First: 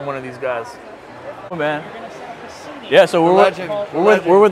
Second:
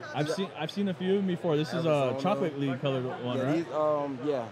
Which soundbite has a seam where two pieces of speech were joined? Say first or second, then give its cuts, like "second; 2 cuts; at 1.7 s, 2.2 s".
first; 1 cut; at 1.5 s